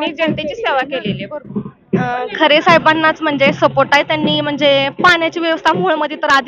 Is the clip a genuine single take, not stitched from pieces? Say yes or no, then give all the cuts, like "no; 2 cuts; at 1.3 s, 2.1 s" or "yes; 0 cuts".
no; 1 cut; at 1.5 s